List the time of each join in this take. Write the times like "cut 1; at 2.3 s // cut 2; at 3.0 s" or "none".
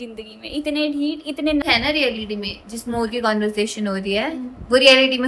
cut 1; at 1.6 s